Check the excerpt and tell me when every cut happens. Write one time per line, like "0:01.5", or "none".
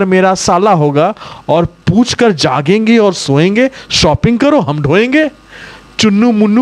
none